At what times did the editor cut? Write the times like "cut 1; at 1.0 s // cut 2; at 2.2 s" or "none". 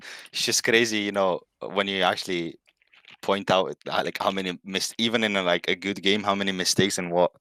none